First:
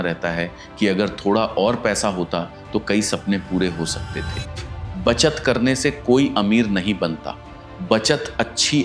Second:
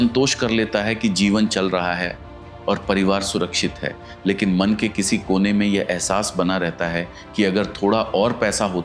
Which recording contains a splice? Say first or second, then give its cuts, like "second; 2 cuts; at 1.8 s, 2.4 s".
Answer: first; 1 cut; at 4.6 s